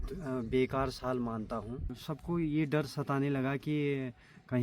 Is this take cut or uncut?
cut